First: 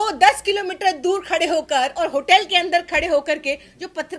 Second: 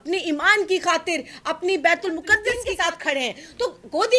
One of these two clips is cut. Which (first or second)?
second